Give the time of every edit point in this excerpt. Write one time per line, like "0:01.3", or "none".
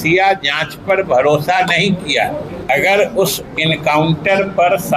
0:02.5